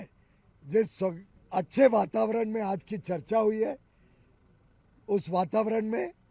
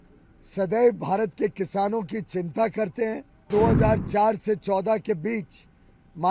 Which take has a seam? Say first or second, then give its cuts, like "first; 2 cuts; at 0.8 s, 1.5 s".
second; 1 cut; at 3.5 s